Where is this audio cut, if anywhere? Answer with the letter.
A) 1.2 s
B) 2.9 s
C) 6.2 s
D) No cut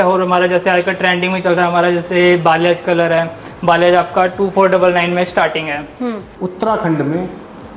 C